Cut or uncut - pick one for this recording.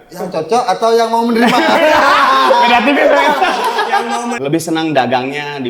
cut